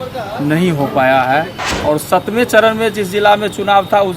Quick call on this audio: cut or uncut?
cut